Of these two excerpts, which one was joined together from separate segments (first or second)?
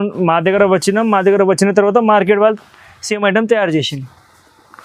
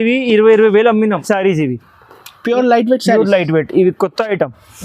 second